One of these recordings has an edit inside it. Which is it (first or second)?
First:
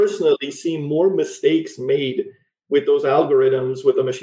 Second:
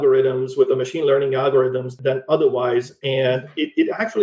second